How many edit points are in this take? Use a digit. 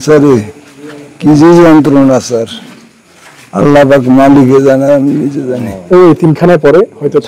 1